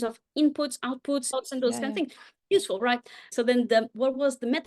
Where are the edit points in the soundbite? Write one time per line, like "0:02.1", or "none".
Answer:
0:01.3
0:03.2